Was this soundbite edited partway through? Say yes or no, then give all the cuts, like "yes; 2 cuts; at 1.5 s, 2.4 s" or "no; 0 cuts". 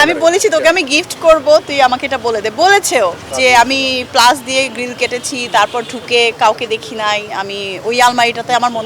no; 0 cuts